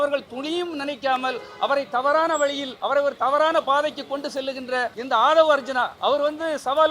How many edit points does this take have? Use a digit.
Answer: 3